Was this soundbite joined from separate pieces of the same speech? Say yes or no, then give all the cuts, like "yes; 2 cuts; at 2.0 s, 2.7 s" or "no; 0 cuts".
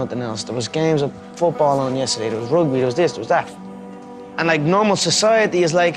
no; 0 cuts